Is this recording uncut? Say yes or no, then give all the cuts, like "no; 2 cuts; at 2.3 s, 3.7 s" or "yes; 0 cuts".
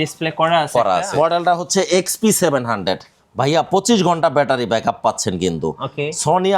no; 1 cut; at 1.1 s